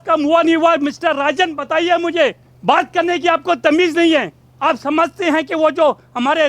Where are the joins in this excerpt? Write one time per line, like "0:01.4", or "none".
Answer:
0:02.5
0:04.4